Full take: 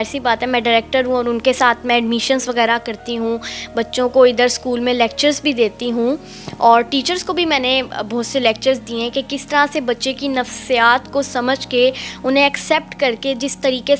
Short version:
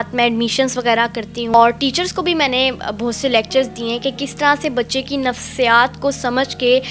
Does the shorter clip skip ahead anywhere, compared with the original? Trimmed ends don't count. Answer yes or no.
yes